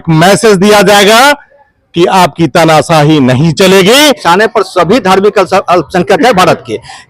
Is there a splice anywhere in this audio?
yes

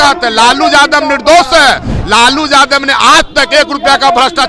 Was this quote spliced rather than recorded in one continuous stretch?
no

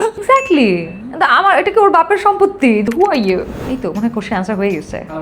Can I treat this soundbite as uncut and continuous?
no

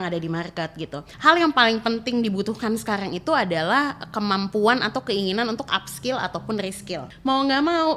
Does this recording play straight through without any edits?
no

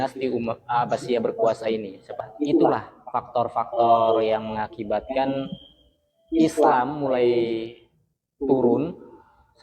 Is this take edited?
yes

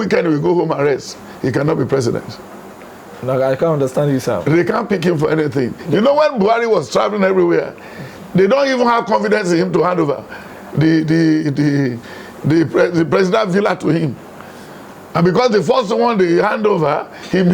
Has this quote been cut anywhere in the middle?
no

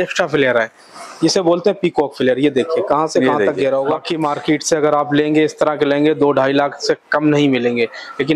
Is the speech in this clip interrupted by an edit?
yes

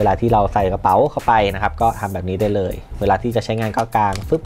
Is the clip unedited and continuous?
yes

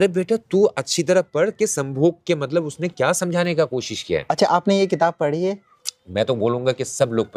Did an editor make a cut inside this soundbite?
no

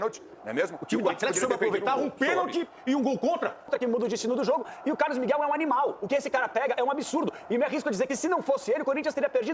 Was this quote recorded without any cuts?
no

